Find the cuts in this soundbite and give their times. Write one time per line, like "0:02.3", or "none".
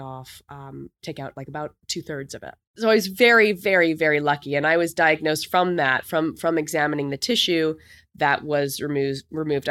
0:02.8